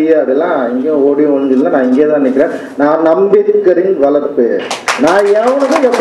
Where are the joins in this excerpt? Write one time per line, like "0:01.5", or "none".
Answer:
none